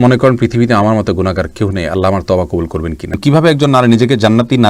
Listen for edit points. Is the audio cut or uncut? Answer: cut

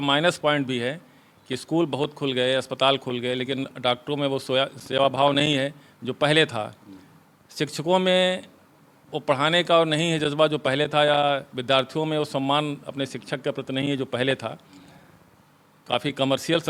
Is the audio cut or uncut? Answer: uncut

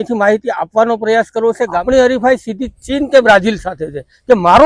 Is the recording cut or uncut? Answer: cut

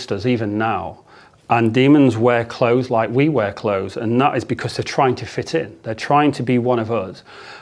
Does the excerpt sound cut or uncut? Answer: uncut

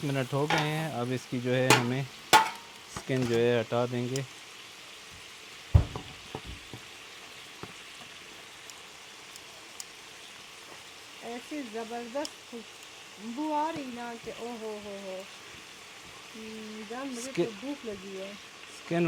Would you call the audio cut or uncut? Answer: uncut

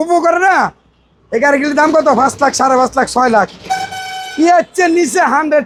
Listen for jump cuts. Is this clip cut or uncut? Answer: uncut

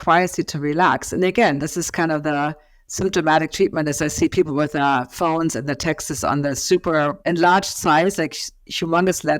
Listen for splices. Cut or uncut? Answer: cut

